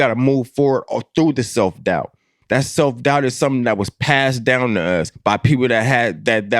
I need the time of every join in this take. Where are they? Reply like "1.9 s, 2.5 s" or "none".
2.4 s